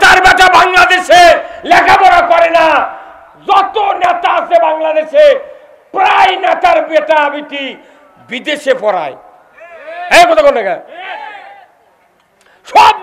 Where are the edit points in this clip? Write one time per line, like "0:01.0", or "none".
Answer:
none